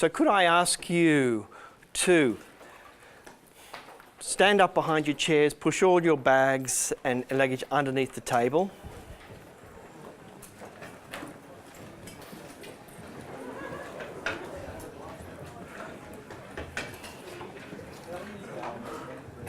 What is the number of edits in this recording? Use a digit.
1